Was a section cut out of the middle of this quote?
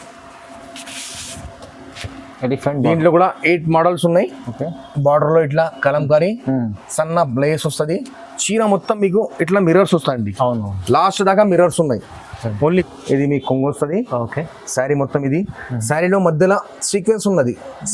yes; 1 cut; at 12.9 s

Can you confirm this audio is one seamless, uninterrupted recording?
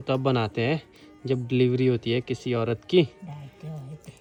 yes; 0 cuts

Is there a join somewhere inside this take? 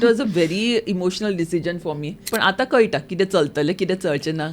yes; 1 cut; at 2.2 s

